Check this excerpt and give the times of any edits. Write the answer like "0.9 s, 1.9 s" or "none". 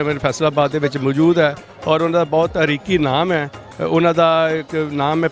none